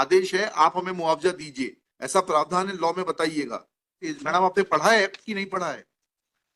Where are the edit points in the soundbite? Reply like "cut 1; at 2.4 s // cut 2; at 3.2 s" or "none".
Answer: cut 1; at 4.2 s